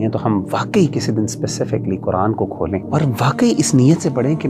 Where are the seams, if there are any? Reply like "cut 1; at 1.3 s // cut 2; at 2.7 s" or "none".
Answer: cut 1; at 2.9 s